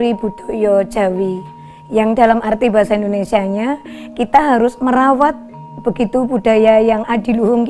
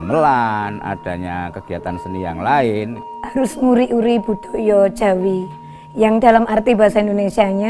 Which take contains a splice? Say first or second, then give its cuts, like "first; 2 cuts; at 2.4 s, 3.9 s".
second; 1 cut; at 3.1 s